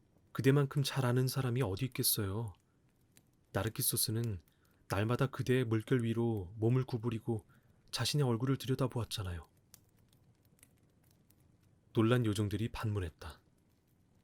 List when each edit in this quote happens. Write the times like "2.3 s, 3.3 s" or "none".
9.7 s, 11.5 s